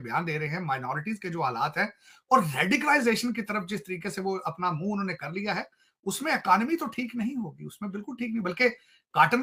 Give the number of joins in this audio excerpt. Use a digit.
0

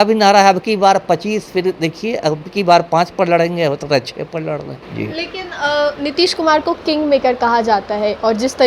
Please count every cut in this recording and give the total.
0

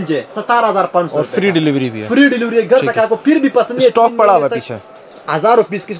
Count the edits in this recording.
0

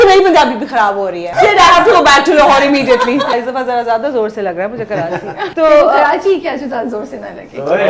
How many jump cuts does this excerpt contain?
3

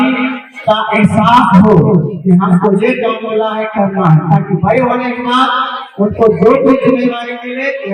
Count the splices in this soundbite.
0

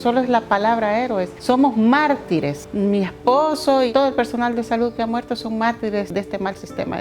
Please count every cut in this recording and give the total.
4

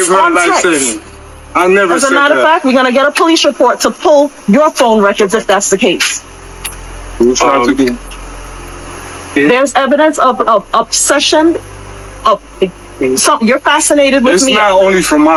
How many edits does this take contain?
0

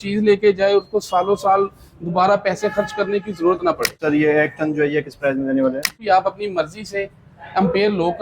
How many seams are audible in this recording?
2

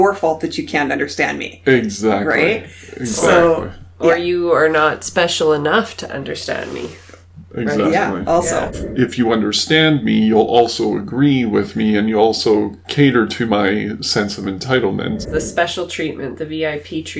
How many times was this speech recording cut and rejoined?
2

